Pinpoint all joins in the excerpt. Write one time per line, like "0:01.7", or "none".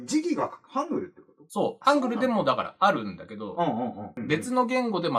0:04.2